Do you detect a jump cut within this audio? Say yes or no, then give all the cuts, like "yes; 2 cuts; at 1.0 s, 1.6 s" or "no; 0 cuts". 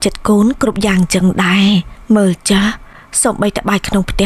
no; 0 cuts